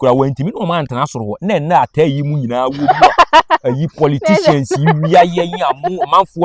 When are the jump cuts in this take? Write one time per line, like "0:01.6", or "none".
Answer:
none